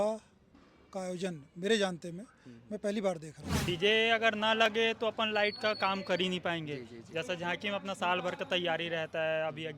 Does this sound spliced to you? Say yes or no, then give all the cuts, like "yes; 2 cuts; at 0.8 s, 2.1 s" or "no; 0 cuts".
yes; 1 cut; at 3.5 s